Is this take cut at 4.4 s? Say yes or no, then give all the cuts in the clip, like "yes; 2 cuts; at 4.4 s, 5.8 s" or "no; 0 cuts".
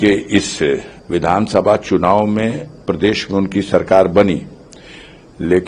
no; 1 cut; at 0.9 s